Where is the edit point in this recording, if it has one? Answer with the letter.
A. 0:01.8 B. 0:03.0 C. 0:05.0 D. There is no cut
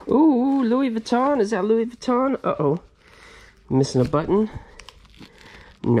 D